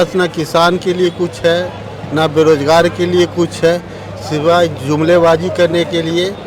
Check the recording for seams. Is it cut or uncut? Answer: uncut